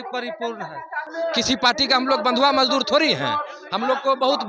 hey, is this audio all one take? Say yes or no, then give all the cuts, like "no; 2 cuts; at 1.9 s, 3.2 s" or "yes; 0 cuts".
no; 1 cut; at 1.0 s